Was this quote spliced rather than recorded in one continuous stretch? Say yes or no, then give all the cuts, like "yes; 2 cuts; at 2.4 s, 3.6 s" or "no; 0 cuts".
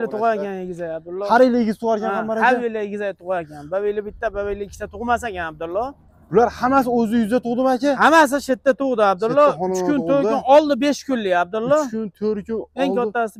no; 0 cuts